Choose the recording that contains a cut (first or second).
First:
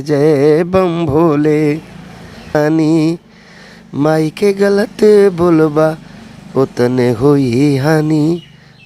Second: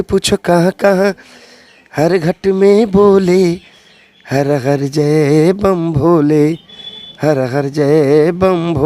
first